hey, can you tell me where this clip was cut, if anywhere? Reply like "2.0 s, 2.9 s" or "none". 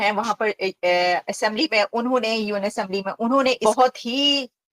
3.6 s